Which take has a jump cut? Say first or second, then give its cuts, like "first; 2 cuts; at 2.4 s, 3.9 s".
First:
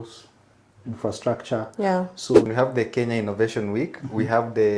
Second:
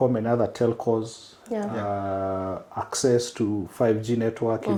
first; 1 cut; at 2.5 s